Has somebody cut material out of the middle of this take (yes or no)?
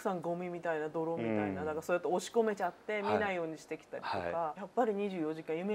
yes